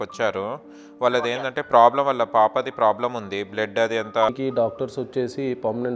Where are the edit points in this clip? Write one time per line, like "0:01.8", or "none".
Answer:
0:04.3